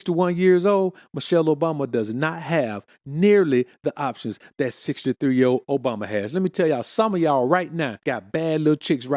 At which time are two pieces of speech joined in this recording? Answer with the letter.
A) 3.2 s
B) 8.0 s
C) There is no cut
B